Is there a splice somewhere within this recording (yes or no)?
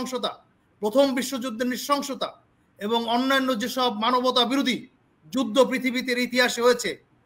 no